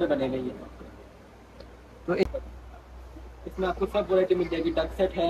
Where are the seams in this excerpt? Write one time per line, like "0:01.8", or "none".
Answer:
0:02.2